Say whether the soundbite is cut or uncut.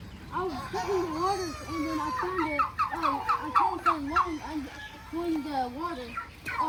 uncut